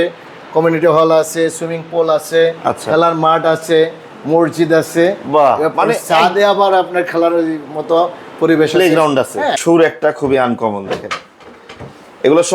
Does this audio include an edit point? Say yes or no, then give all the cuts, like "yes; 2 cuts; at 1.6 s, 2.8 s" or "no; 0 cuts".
yes; 1 cut; at 9.5 s